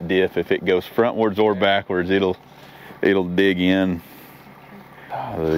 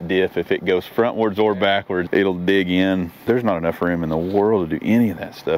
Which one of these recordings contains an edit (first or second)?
second